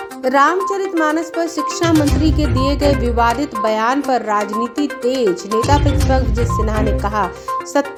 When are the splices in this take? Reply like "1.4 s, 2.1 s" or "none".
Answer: none